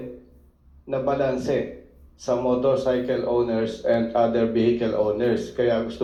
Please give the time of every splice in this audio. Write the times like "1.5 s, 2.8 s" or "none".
none